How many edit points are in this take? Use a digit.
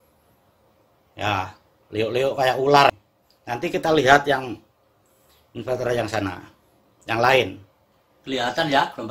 1